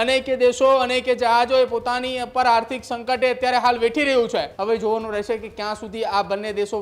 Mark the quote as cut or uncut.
cut